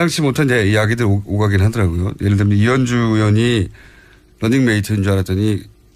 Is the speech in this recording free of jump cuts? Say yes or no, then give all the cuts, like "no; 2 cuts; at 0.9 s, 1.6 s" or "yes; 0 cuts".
yes; 0 cuts